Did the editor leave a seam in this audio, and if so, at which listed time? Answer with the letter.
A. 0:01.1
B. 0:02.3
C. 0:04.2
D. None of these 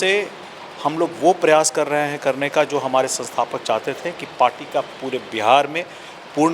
D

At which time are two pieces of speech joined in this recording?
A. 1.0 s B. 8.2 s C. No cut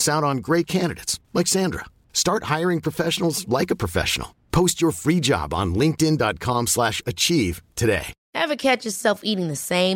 B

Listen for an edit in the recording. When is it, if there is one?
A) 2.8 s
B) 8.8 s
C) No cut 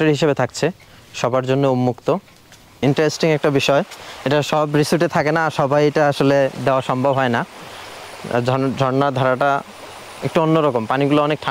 A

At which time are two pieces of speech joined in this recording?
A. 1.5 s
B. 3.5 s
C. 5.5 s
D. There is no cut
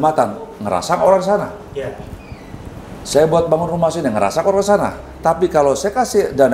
D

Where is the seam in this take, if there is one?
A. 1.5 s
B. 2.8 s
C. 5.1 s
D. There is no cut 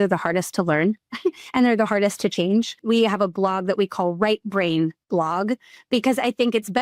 B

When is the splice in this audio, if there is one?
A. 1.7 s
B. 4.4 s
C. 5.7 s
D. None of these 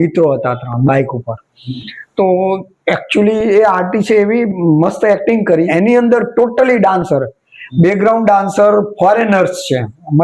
C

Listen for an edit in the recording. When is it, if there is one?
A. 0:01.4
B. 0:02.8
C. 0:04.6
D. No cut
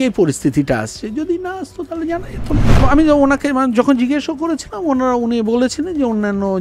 B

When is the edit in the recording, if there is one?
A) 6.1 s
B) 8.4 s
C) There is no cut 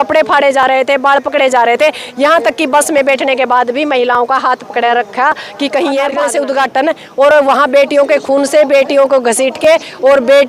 A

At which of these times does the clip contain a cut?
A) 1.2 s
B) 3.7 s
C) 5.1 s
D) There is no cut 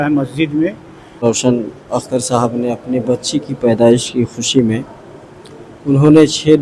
A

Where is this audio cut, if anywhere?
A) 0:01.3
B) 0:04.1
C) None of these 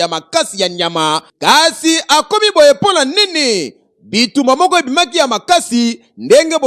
A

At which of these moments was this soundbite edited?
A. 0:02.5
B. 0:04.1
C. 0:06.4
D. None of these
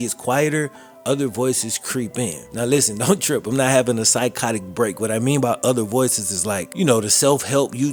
D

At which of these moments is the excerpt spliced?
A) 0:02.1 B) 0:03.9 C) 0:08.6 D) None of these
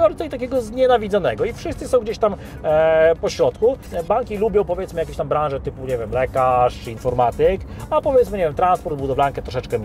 B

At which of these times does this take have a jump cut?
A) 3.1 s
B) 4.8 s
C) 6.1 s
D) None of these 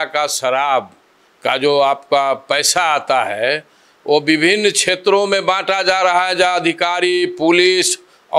D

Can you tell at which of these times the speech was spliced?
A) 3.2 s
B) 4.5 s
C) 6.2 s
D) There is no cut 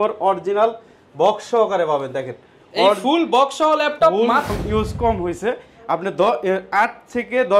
B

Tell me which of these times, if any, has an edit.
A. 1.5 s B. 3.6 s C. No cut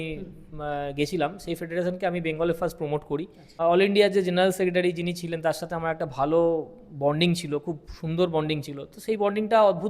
B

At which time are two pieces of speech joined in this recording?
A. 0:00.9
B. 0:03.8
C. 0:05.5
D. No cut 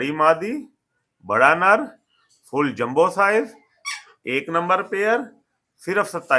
D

